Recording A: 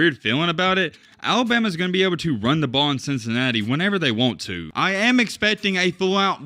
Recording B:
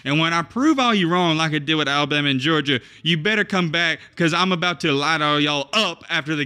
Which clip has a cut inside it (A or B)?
A